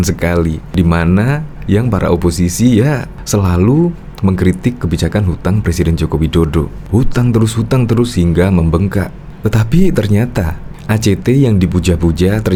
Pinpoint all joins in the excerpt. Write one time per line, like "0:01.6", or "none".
none